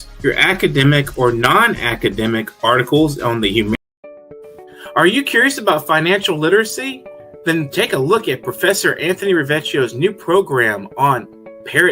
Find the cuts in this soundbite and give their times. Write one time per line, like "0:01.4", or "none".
0:03.8